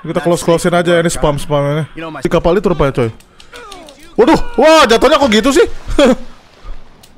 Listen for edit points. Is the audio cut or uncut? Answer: cut